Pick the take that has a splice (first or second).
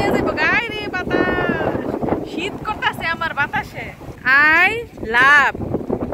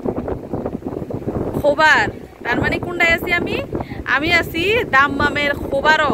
first